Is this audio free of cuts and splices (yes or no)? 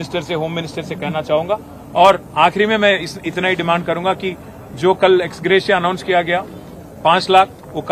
yes